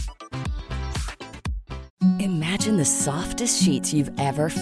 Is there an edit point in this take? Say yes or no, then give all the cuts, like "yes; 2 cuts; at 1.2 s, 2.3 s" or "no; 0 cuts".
yes; 1 cut; at 1.8 s